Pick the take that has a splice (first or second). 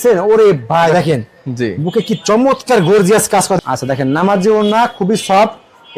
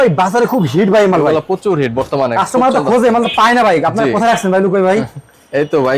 first